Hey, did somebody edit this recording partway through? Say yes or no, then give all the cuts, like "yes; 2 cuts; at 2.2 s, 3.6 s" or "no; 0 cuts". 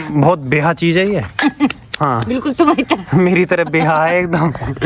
no; 0 cuts